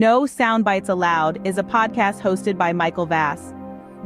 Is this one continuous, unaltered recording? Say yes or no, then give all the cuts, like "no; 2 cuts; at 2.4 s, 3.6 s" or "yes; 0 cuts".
no; 1 cut; at 0.9 s